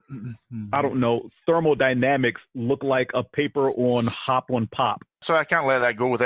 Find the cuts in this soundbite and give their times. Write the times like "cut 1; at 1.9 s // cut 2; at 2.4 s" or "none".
cut 1; at 5.2 s